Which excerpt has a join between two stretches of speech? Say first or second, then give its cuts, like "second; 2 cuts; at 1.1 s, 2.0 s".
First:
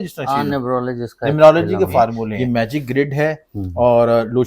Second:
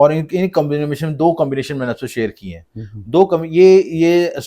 first; 1 cut; at 2.3 s